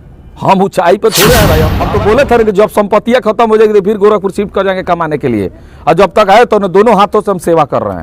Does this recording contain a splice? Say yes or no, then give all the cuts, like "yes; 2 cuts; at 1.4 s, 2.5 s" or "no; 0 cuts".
yes; 1 cut; at 1.7 s